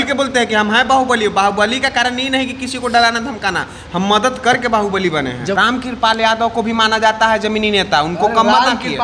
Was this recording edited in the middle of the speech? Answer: yes; 1 cut; at 5.6 s

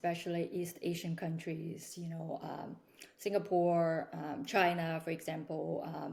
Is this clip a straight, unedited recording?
yes; 0 cuts

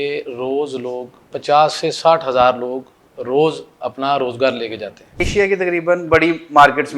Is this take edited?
yes; 1 cut; at 5.1 s

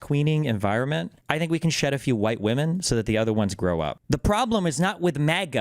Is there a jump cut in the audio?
yes; 2 cuts; at 1.1 s, 4.0 s

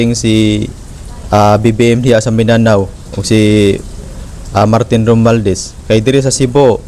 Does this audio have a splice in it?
no; 0 cuts

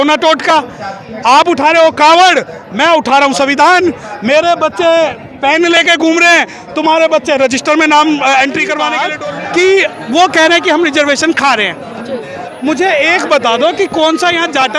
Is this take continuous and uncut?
no; 1 cut; at 9.1 s

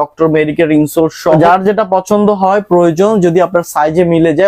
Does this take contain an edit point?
yes; 1 cut; at 1.4 s

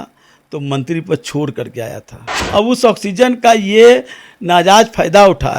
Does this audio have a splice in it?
yes; 1 cut; at 2.3 s

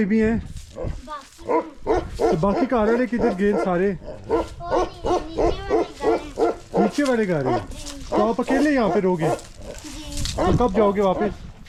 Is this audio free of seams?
yes; 0 cuts

